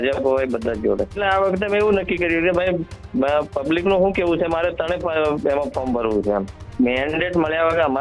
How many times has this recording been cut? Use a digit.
2